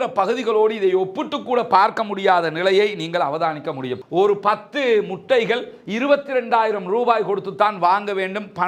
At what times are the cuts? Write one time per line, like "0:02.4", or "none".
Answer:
0:04.0